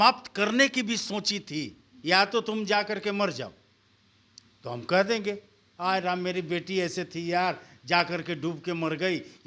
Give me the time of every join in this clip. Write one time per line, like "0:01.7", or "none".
0:01.9

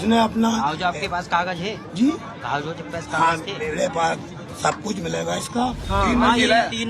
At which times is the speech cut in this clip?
0:05.8

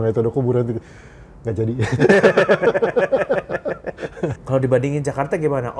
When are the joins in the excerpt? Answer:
0:04.4

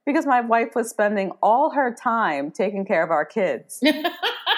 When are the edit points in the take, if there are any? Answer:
0:03.7

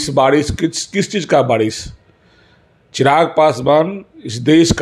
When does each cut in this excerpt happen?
none

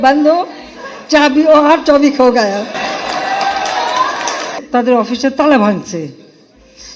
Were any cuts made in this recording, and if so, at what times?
none

